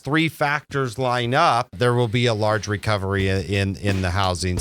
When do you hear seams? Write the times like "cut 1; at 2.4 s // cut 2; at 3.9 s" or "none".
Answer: cut 1; at 1.8 s